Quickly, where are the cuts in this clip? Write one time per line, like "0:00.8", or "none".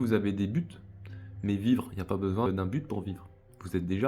0:02.5